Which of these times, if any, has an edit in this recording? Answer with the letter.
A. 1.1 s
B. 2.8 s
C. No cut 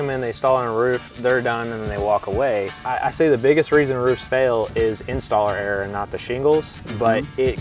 B